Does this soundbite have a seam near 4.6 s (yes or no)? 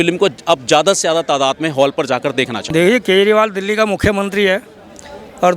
no